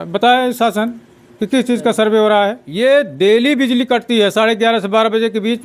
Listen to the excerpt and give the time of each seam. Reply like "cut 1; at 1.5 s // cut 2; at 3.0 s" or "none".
cut 1; at 2.6 s